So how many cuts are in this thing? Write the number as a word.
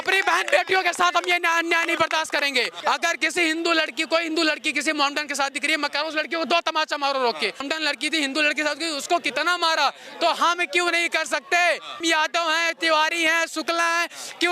three